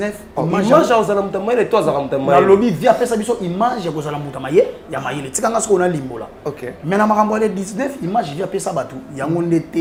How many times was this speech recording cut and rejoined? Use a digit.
0